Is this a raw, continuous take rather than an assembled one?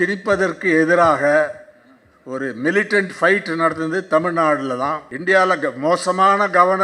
no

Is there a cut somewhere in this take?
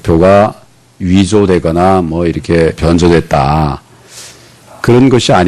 yes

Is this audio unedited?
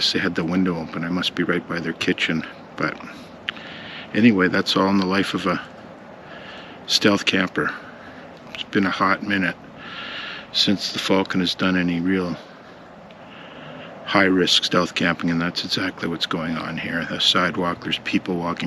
no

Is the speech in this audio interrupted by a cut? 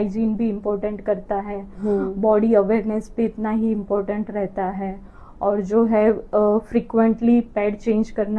no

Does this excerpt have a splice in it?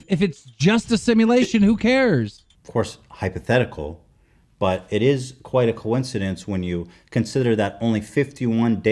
yes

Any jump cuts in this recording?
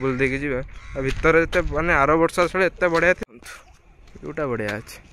yes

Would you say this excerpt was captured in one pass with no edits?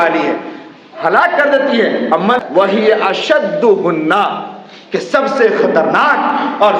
no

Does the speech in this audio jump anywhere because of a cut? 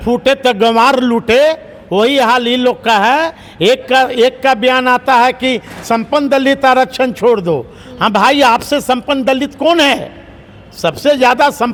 no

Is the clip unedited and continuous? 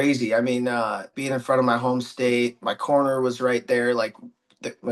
no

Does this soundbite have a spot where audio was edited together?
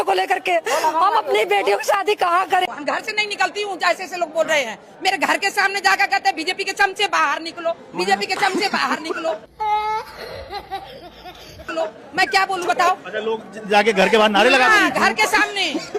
no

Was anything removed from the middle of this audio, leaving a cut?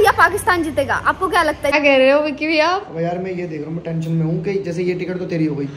yes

